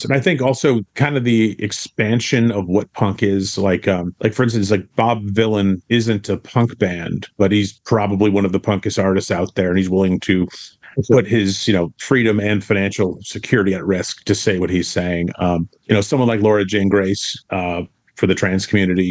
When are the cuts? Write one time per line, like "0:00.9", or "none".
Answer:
none